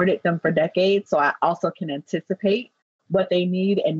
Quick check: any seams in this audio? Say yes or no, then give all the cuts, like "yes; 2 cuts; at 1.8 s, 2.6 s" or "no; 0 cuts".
no; 0 cuts